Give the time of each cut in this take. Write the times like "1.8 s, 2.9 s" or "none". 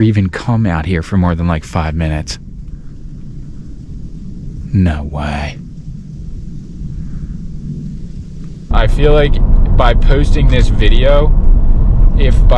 8.7 s